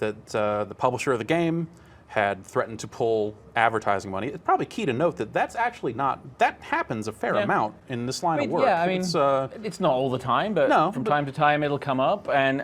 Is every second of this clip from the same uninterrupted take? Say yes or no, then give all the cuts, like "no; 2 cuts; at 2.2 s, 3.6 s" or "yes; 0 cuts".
yes; 0 cuts